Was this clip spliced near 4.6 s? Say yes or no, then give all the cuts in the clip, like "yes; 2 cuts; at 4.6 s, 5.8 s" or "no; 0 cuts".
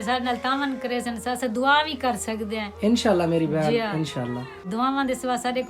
yes; 1 cut; at 4.6 s